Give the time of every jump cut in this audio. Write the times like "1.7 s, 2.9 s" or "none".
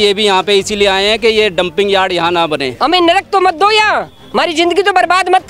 2.8 s